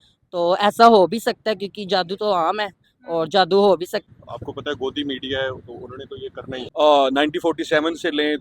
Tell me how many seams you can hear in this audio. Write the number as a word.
two